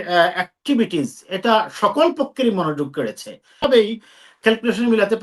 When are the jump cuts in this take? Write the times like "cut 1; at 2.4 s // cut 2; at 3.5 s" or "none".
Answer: cut 1; at 3.6 s